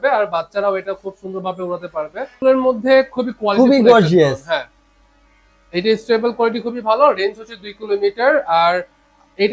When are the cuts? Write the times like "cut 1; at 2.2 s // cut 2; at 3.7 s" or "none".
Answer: cut 1; at 2.4 s